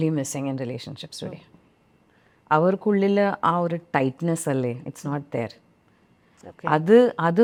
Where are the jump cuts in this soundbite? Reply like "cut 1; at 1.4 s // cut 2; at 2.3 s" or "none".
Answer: none